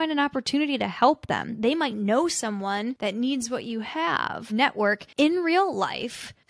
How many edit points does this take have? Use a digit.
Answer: 3